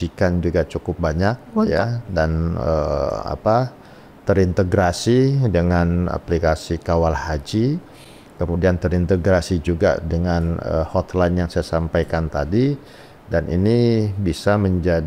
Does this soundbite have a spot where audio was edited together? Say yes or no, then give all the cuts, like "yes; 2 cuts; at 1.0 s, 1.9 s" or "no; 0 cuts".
no; 0 cuts